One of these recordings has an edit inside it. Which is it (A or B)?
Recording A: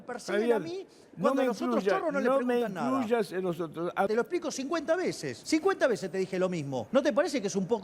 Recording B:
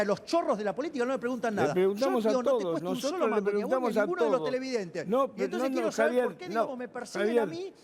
A